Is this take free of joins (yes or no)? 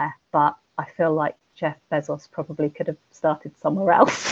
yes